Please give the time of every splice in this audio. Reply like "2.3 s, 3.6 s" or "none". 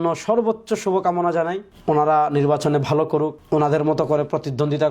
1.7 s, 3.4 s